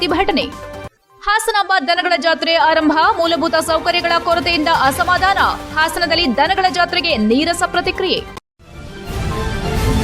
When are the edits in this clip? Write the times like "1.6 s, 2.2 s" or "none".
8.3 s